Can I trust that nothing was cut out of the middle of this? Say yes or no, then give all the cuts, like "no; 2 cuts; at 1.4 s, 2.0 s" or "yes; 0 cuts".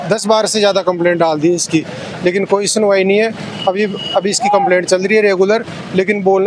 yes; 0 cuts